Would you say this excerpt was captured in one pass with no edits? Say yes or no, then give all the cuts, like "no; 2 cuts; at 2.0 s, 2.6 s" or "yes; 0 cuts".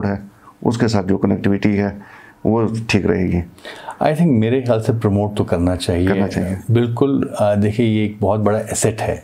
yes; 0 cuts